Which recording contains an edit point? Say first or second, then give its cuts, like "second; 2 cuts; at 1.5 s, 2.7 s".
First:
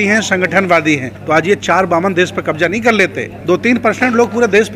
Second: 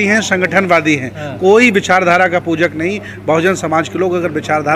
first; 2 cuts; at 1.1 s, 3.3 s